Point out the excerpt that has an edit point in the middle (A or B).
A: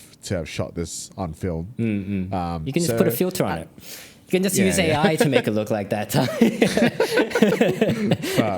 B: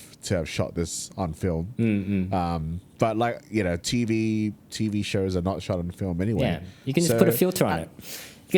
A